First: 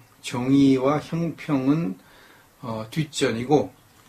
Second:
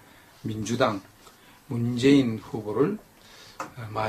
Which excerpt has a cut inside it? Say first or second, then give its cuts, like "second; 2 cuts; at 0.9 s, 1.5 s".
first; 1 cut; at 3.1 s